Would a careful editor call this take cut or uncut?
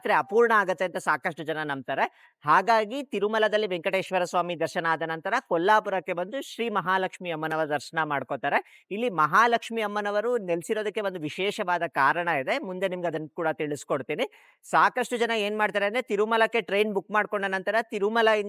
uncut